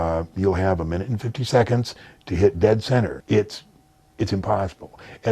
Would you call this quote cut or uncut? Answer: cut